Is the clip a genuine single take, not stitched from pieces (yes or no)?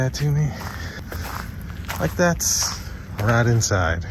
no